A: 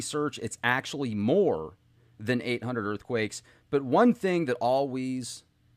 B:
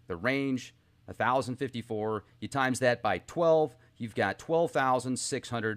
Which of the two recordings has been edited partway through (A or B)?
B